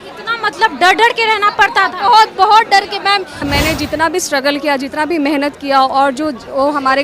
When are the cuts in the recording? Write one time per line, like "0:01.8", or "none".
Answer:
0:03.5